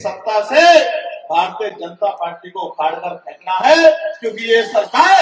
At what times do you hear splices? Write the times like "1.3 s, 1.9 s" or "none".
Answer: none